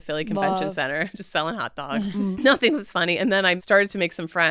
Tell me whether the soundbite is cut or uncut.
cut